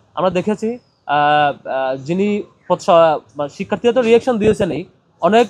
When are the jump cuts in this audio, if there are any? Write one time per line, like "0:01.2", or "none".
none